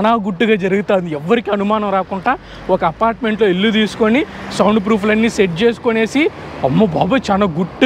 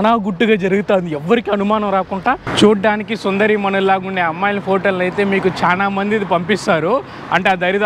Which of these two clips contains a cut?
second; 1 cut; at 2.5 s

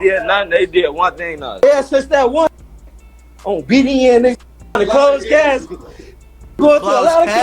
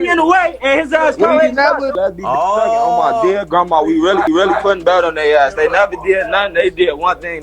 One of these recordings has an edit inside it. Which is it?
second; 1 cut; at 4.3 s

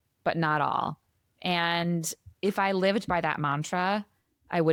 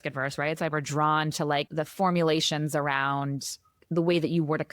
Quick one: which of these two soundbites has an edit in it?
second; 1 cut; at 3.7 s

